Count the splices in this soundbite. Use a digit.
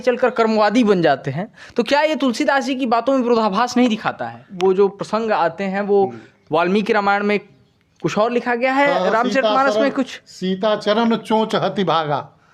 1